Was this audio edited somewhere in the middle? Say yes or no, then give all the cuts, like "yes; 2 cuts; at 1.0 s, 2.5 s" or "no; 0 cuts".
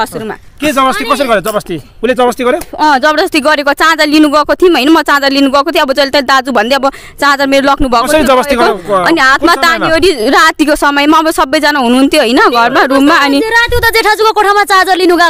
no; 0 cuts